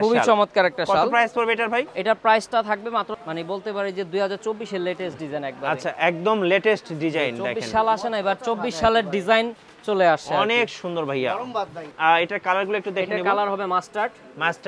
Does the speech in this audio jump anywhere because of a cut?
yes; 2 cuts; at 3.1 s, 11.9 s

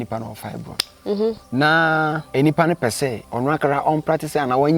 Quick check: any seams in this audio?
yes; 3 cuts; at 1.4 s, 2.2 s, 3.2 s

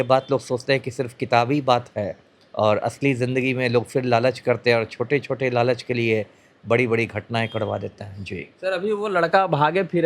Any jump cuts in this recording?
no; 0 cuts

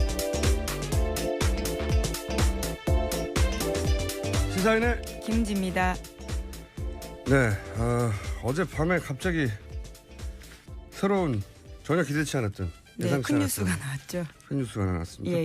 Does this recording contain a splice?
yes; 1 cut; at 2.0 s

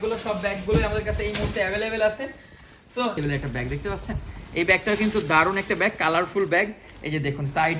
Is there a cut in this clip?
yes; 1 cut; at 3.2 s

